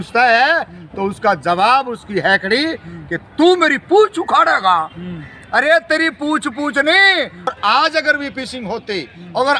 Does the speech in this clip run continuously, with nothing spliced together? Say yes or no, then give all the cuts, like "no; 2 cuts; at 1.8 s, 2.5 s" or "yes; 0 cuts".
no; 1 cut; at 7.6 s